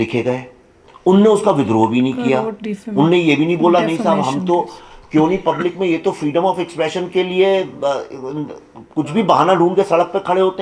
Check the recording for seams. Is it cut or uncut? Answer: uncut